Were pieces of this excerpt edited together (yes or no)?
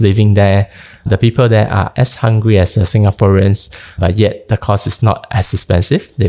yes